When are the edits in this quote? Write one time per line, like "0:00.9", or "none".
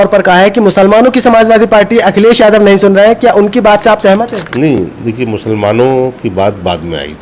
none